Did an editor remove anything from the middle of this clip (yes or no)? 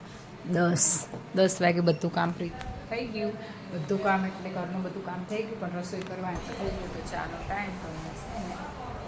yes